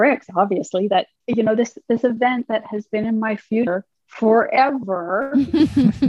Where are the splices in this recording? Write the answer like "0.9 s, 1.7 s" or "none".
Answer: 1.2 s

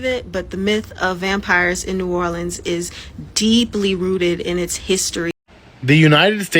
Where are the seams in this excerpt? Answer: 5.3 s

